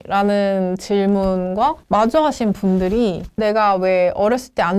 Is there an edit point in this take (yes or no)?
yes